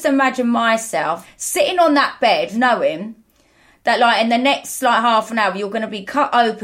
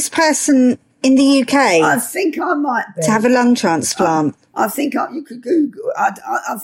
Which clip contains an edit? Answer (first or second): first